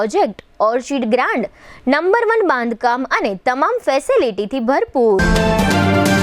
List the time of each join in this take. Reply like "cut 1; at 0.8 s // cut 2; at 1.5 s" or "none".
cut 1; at 5.2 s

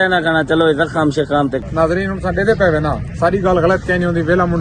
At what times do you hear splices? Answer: cut 1; at 1.7 s

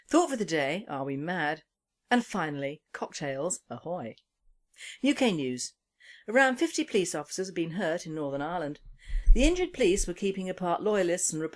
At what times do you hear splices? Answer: cut 1; at 7.4 s

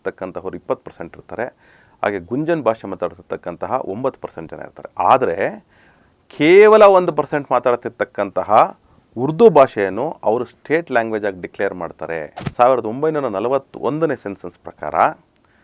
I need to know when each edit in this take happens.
cut 1; at 12.4 s

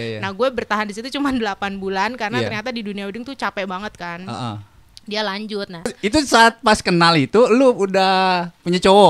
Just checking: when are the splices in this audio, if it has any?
cut 1; at 6.0 s

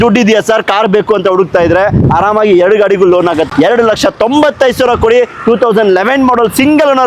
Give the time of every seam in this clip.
cut 1; at 3.5 s

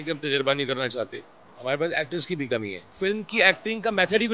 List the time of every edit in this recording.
cut 1; at 1.1 s // cut 2; at 2.8 s

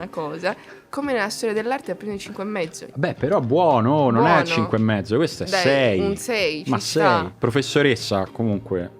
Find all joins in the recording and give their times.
cut 1; at 2.8 s // cut 2; at 7.3 s

